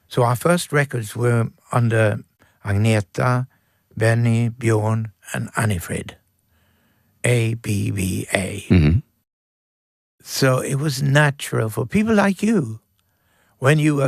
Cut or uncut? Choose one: uncut